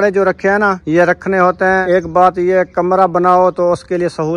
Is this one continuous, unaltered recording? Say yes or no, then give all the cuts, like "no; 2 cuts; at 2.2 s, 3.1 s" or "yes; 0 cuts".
no; 2 cuts; at 0.8 s, 1.8 s